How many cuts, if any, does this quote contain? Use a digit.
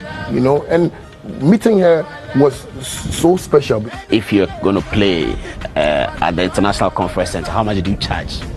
1